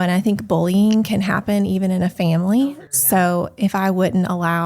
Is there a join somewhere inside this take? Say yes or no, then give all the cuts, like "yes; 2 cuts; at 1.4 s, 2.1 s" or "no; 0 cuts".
yes; 1 cut; at 2.6 s